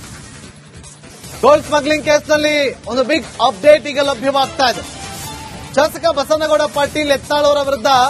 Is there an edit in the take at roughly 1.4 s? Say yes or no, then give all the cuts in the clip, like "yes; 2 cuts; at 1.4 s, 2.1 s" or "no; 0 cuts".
yes; 1 cut; at 1.4 s